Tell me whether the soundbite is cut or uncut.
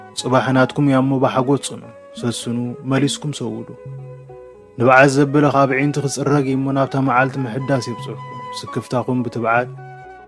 uncut